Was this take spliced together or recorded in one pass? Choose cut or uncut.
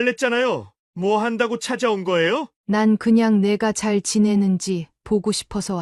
cut